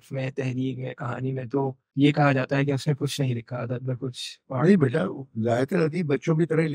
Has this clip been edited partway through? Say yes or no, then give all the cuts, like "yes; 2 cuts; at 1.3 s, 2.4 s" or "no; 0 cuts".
yes; 1 cut; at 1.8 s